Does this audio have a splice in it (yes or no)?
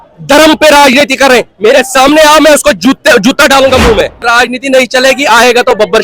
yes